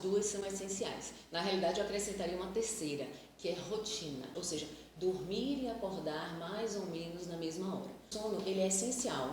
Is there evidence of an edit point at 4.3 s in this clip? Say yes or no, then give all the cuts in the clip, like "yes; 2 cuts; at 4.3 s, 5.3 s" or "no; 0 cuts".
yes; 2 cuts; at 4.3 s, 8.0 s